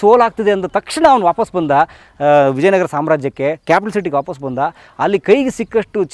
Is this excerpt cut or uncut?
uncut